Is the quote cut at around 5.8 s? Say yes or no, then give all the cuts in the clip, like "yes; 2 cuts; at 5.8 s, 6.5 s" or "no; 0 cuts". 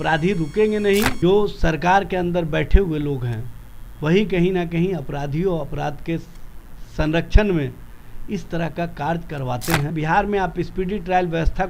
no; 2 cuts; at 1.1 s, 9.9 s